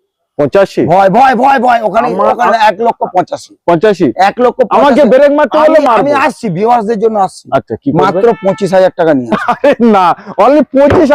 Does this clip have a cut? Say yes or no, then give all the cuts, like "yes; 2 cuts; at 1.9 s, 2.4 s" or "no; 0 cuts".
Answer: no; 0 cuts